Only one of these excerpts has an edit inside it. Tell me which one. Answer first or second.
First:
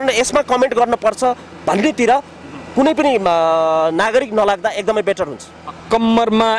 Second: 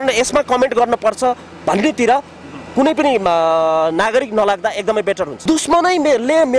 second